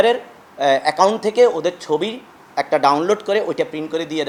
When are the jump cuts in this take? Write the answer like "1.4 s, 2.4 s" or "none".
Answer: none